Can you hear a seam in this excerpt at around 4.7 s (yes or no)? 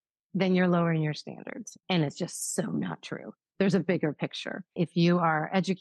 yes